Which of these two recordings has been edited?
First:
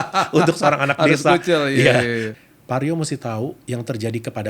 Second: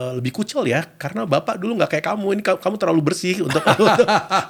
first; 1 cut; at 2.3 s

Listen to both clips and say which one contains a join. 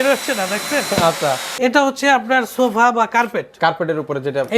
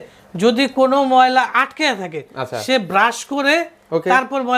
first; 1 cut; at 1.5 s

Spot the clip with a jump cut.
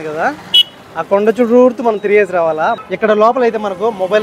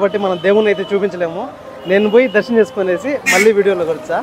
first; 1 cut; at 2.9 s

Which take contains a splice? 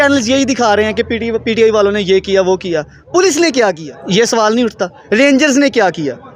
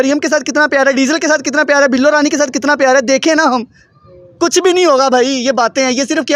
first; 1 cut; at 3.9 s

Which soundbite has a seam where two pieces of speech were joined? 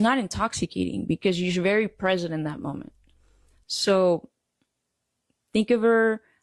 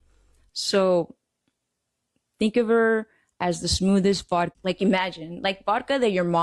second; 1 cut; at 4.6 s

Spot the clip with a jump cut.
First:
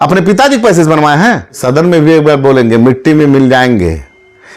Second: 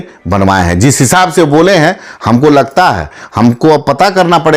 first; 1 cut; at 1.6 s

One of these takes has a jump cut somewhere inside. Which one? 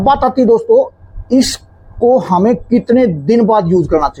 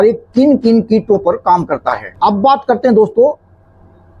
second; 1 cut; at 2.0 s

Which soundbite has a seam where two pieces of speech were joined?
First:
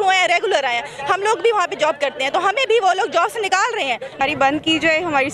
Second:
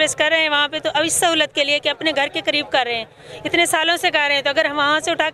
first; 1 cut; at 4.2 s

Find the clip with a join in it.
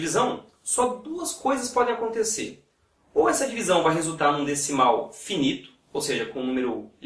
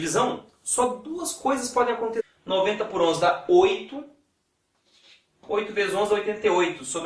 first; 1 cut; at 2.2 s

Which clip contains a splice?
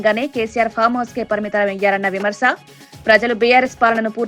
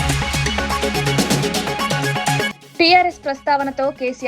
second; 1 cut; at 2.5 s

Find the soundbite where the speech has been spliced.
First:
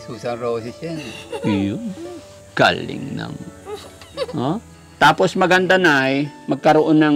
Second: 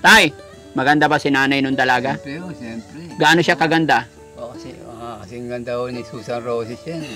first; 1 cut; at 4.8 s

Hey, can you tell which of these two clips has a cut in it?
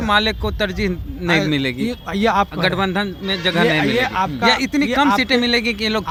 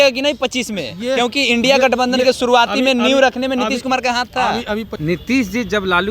second; 1 cut; at 4.9 s

